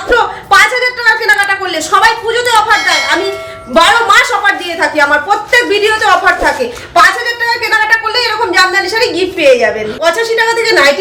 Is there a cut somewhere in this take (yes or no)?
yes